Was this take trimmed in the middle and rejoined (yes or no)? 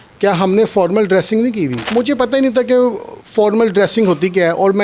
yes